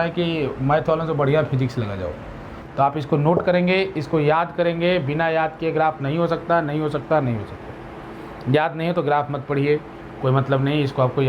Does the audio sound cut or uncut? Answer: cut